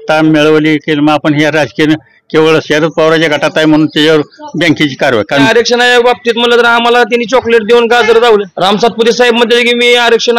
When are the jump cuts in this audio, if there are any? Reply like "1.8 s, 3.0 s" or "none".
5.5 s, 8.5 s